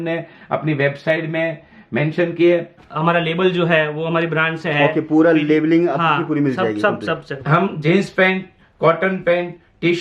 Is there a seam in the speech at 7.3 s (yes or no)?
yes